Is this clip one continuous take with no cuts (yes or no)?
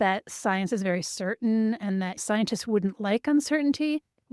no